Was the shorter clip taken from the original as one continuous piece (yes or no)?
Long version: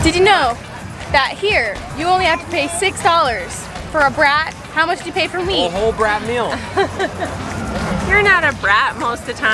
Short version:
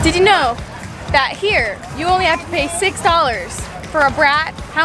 yes